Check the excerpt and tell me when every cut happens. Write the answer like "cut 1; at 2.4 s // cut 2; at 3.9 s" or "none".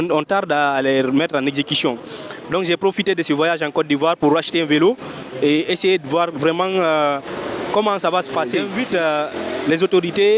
cut 1; at 8.7 s